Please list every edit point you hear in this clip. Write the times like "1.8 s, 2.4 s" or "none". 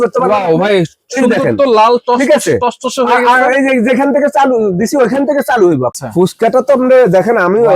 6.0 s